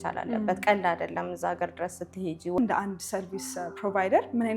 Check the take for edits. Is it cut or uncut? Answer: cut